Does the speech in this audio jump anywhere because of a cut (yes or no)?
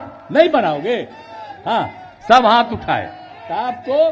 no